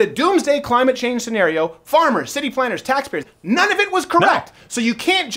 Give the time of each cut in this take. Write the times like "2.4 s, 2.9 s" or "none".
3.3 s